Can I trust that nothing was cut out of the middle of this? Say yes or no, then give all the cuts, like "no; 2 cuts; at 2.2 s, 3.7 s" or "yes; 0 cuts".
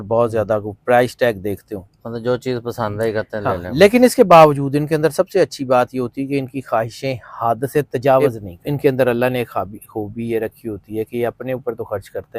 no; 1 cut; at 8.2 s